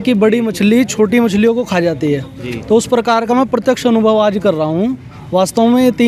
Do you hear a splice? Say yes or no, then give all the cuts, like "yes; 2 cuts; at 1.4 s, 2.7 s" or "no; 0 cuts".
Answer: no; 0 cuts